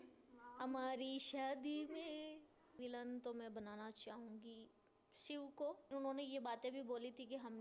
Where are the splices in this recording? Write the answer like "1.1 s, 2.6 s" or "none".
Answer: 2.7 s, 5.9 s